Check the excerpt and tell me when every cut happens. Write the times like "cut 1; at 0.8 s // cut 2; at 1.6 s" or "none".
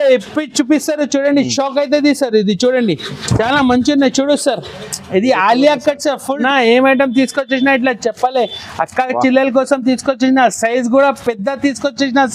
cut 1; at 6.4 s